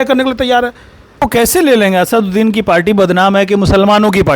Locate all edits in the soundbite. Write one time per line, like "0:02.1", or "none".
0:01.2